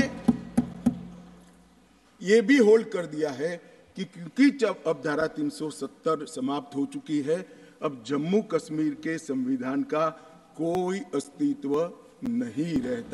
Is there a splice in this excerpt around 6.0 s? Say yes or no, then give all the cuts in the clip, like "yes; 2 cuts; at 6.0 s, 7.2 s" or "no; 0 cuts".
no; 0 cuts